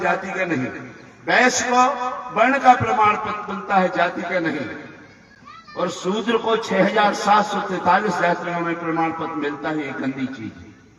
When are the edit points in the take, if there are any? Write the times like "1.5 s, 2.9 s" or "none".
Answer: none